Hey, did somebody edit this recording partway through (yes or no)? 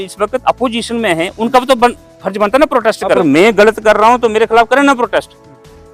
yes